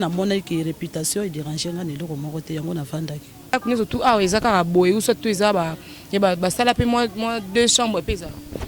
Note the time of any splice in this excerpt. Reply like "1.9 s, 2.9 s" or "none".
3.5 s